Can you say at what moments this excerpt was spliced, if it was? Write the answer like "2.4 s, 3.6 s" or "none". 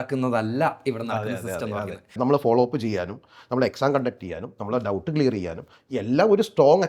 2.1 s

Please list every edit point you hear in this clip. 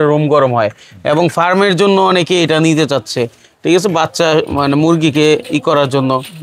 none

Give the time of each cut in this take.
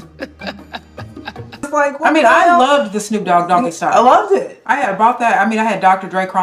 1.6 s

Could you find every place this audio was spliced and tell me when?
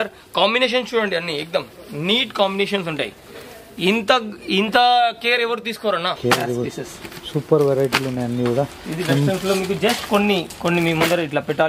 6.2 s

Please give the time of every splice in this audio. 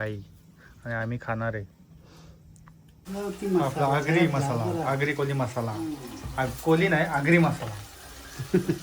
3.0 s

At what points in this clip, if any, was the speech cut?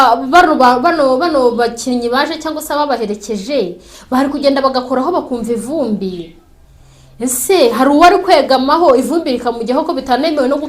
none

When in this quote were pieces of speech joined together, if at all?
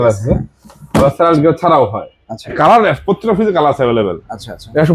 2.6 s

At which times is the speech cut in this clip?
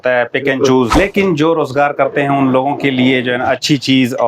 0.9 s

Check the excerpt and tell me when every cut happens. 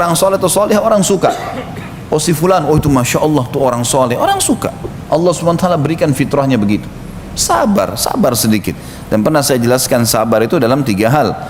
none

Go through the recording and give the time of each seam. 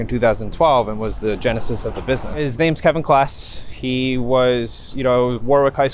2.4 s

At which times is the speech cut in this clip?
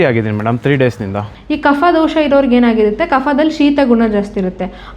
1.3 s

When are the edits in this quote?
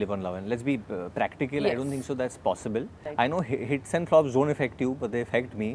3.0 s

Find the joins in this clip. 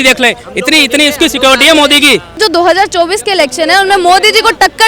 2.4 s

